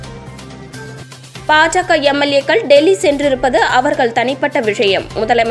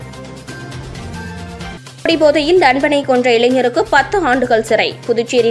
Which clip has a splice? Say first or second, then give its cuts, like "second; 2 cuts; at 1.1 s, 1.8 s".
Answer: first; 1 cut; at 1.0 s